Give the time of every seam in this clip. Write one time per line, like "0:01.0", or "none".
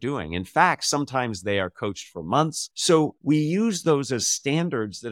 0:02.7